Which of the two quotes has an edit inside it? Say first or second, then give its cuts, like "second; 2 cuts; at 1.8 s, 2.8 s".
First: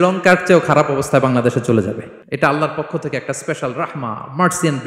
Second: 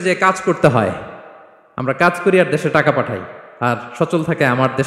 first; 1 cut; at 2.1 s